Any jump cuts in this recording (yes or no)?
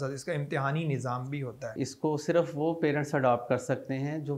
yes